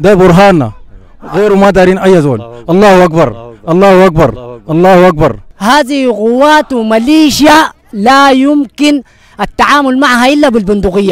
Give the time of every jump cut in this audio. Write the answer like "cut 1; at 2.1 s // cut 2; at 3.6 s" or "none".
cut 1; at 5.5 s